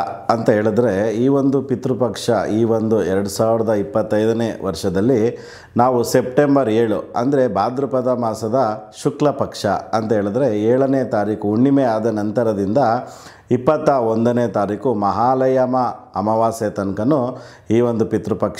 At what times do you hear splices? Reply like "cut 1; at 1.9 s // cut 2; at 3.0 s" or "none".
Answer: none